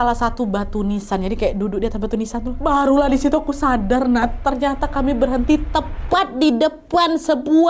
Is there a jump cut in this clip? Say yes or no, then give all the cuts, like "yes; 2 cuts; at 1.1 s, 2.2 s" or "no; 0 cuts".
yes; 1 cut; at 2.5 s